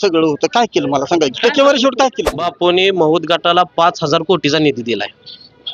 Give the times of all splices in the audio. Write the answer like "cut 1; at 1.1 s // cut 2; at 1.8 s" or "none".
cut 1; at 2.4 s